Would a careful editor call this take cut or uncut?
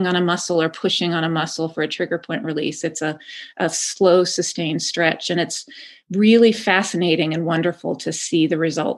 uncut